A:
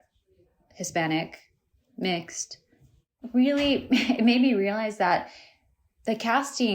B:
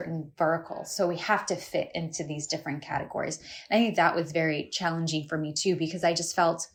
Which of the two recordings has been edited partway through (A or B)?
A